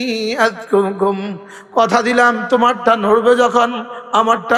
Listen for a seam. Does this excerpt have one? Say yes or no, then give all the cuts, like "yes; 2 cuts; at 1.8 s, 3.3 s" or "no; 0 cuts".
no; 0 cuts